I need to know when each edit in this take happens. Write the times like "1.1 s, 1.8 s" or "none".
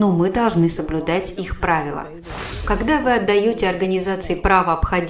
2.4 s